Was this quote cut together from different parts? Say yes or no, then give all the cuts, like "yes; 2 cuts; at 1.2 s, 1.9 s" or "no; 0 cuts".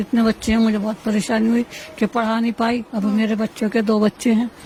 no; 0 cuts